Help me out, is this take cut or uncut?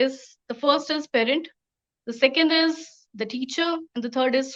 uncut